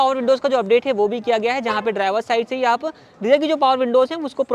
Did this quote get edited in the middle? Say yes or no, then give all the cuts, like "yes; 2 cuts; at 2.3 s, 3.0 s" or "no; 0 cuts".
no; 0 cuts